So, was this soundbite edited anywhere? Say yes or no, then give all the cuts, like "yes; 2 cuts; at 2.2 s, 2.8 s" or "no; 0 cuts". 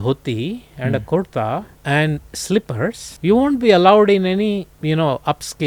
yes; 3 cuts; at 1.7 s, 3.1 s, 4.7 s